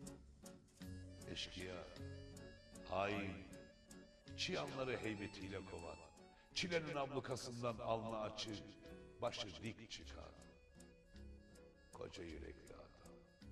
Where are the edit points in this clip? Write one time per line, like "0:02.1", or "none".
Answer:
0:01.0

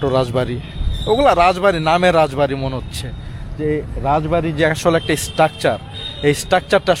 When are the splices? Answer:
none

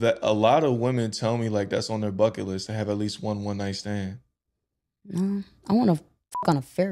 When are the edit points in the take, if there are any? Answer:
none

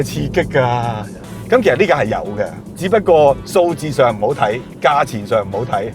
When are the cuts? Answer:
none

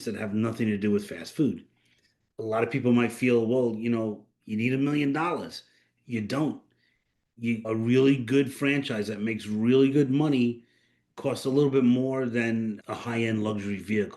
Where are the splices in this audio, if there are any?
0:02.2
0:07.6
0:12.8

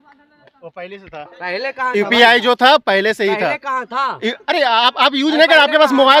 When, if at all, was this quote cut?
none

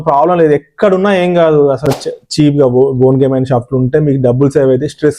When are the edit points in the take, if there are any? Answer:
0:01.9

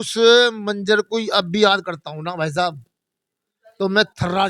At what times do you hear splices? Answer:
none

